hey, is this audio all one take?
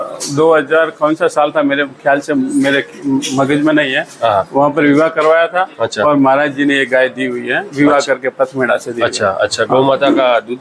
yes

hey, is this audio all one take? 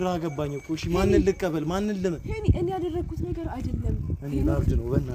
yes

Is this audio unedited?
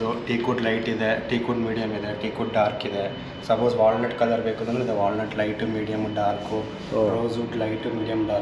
yes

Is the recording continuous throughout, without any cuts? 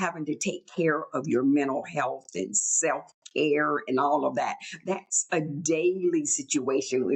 yes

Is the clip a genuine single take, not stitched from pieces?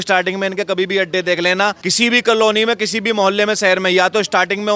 no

